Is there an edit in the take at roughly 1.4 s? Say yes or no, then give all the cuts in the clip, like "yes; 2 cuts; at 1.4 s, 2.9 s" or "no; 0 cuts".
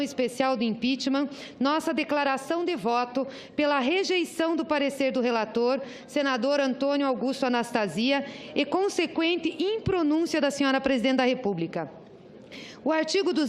yes; 1 cut; at 1.4 s